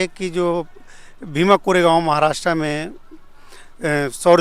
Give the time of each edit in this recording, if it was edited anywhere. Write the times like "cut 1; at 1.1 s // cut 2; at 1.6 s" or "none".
none